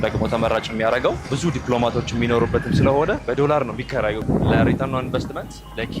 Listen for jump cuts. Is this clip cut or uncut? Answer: cut